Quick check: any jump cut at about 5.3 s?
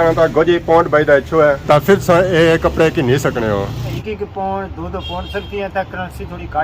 no; 1 cut; at 3.8 s

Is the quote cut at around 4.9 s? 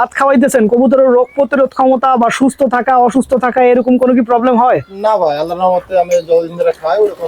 no; 0 cuts

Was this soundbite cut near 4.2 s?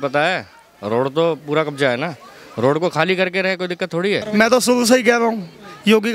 yes; 1 cut; at 4.2 s

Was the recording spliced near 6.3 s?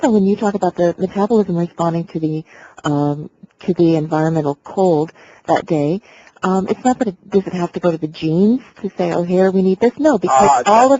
yes; 1 cut; at 6.3 s

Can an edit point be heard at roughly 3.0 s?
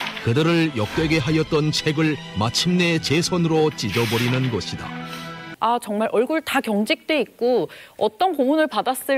no; 1 cut; at 5.5 s

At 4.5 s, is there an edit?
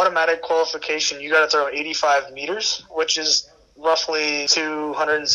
yes; 1 cut; at 4.5 s

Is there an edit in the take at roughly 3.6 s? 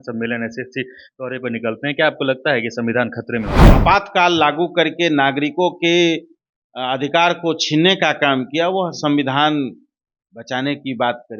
yes; 1 cut; at 3.6 s

